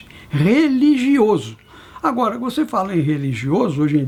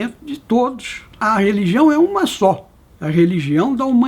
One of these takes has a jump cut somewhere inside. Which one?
second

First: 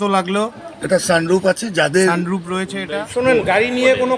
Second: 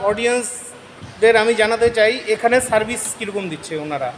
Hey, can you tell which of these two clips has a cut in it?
first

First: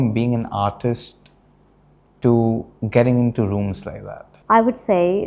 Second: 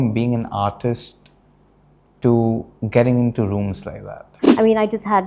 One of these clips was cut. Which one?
second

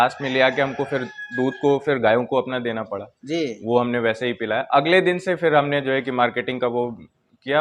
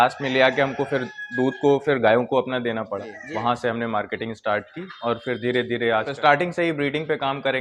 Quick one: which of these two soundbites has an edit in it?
second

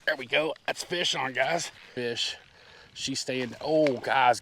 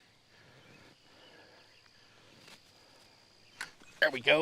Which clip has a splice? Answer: first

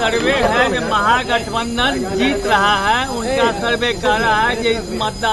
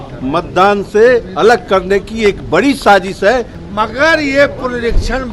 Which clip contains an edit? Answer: second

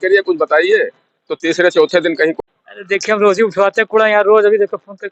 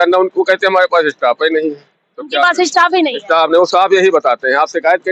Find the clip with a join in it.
first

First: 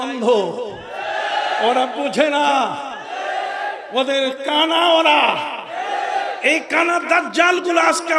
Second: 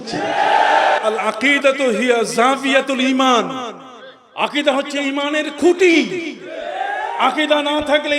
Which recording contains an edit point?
second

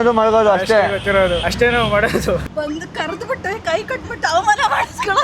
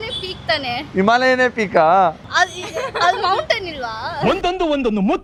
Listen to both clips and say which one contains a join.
first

